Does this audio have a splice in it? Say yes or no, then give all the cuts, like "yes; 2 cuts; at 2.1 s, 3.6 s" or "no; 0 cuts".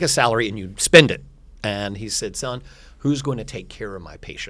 no; 0 cuts